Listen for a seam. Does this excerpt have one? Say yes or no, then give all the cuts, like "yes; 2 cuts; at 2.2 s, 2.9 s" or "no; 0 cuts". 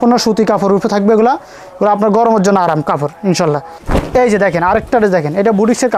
yes; 1 cut; at 3.8 s